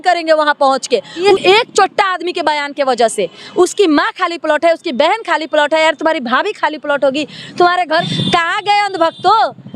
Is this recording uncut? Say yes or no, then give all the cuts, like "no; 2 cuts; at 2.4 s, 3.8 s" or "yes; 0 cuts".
no; 2 cuts; at 1.3 s, 8.1 s